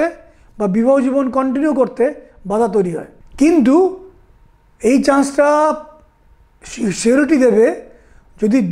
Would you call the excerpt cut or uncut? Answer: cut